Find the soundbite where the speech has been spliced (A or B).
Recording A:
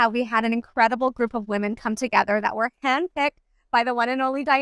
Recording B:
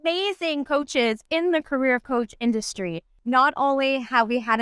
B